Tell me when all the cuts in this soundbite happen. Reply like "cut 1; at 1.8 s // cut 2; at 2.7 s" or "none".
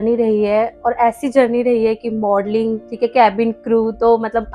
cut 1; at 2.8 s